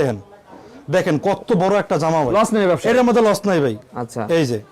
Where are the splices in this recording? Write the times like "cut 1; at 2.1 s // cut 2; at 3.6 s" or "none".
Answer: cut 1; at 2.3 s

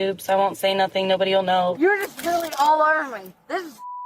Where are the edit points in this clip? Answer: cut 1; at 1.8 s

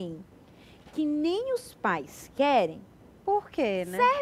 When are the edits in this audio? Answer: none

